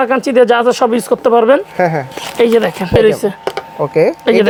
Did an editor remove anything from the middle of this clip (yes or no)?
no